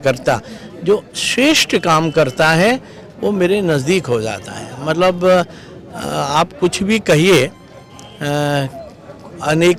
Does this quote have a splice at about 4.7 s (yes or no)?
no